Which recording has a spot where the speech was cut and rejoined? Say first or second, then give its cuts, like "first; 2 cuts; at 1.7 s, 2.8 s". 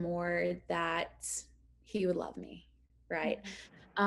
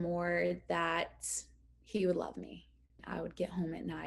second; 1 cut; at 3.0 s